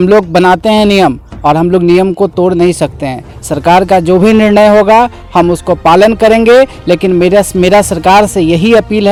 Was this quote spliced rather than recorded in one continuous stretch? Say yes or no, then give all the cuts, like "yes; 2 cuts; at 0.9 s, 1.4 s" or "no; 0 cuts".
no; 0 cuts